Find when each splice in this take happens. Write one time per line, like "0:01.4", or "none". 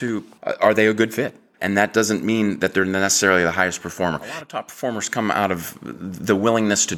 0:01.5
0:04.4